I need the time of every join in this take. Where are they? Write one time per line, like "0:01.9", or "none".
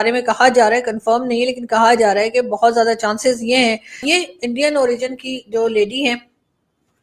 0:04.1